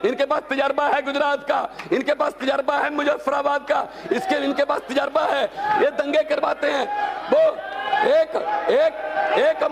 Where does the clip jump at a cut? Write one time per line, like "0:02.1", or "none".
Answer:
none